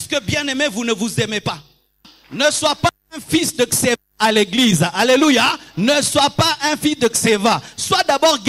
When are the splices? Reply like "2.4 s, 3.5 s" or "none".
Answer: 2.1 s